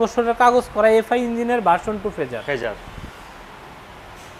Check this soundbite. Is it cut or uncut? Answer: uncut